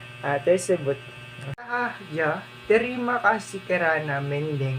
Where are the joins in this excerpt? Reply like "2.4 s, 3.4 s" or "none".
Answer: 1.8 s